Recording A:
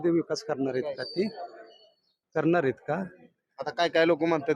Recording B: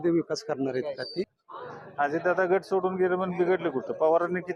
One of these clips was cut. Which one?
B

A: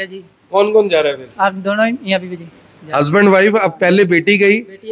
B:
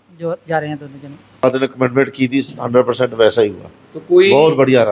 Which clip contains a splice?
B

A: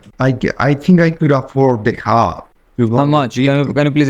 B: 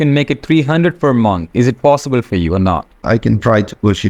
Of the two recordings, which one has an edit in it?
B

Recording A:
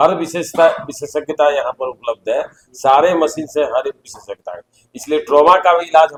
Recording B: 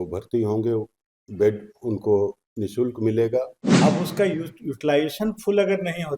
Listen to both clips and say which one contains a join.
B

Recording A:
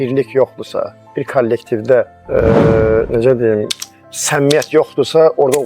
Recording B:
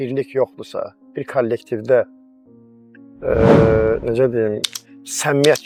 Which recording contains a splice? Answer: A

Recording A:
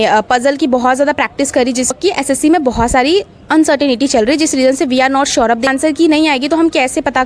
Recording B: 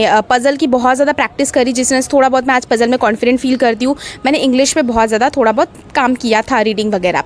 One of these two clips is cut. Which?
A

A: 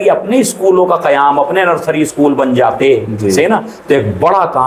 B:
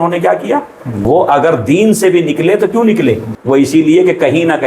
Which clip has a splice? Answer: B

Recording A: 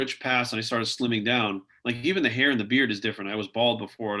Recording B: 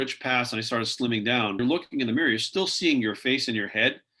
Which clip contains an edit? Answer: B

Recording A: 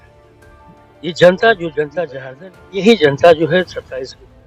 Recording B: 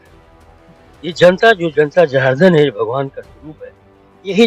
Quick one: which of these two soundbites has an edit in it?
A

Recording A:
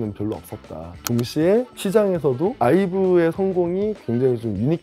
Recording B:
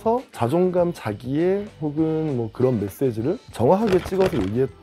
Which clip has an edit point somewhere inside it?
A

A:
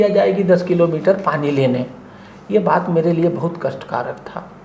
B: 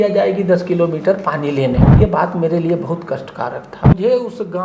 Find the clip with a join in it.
B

